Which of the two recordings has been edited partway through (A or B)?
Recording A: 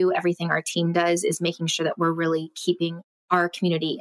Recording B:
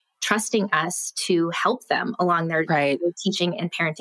A